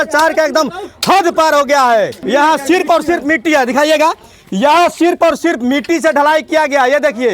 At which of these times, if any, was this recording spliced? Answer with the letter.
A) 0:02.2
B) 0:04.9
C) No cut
A